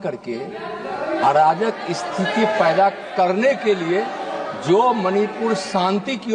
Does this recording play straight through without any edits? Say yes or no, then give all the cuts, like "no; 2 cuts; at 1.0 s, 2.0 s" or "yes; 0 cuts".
yes; 0 cuts